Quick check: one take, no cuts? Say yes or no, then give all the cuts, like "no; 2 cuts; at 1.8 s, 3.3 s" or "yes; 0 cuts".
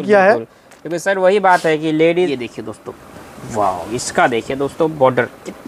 no; 1 cut; at 2.3 s